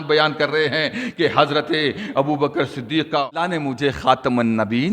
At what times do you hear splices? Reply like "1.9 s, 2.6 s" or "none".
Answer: 3.5 s